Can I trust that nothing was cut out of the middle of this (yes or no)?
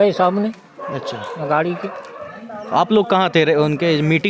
yes